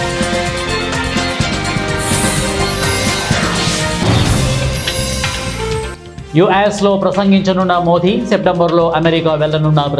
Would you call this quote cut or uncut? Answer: cut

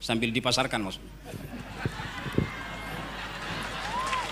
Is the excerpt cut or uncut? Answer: uncut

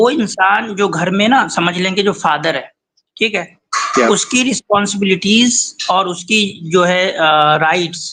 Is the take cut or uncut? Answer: uncut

